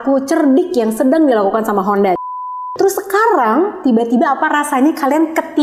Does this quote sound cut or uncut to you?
cut